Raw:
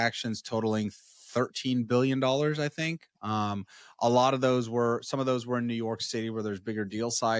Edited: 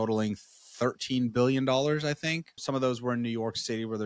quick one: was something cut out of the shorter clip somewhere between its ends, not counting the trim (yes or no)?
yes